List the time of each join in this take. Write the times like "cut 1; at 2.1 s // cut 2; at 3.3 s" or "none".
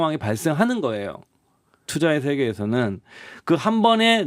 cut 1; at 1.8 s